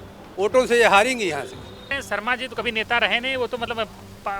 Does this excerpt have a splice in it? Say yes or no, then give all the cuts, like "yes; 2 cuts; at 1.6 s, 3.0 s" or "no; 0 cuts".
yes; 1 cut; at 1.9 s